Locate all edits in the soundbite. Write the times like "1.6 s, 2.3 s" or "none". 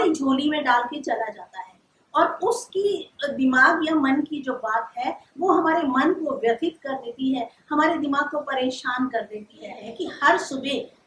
9.8 s